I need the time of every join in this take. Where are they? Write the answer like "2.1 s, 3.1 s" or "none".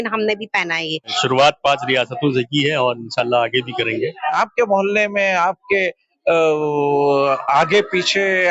1.2 s, 4.3 s